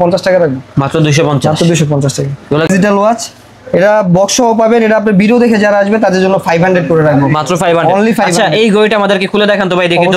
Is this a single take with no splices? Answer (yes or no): no